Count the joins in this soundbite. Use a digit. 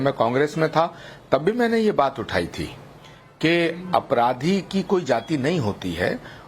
1